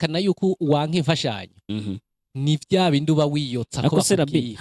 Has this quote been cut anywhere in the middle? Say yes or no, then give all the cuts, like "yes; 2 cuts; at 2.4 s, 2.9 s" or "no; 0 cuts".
no; 0 cuts